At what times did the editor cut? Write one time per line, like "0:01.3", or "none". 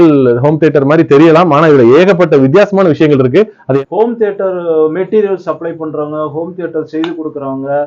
0:03.8